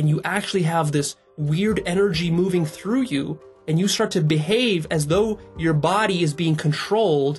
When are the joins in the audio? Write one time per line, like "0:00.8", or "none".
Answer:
none